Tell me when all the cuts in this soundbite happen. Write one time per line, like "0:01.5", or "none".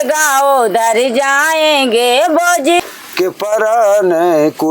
0:02.8